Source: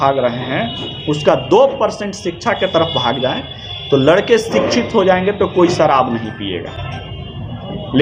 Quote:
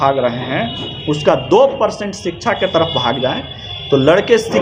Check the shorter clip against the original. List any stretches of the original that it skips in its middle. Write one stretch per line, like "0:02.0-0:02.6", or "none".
none